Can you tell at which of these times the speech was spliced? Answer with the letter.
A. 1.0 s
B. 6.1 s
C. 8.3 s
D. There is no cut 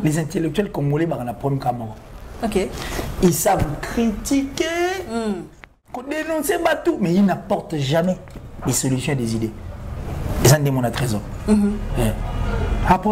B